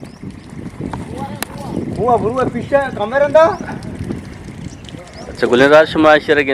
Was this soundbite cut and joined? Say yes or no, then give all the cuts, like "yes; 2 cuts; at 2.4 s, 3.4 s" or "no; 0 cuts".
no; 0 cuts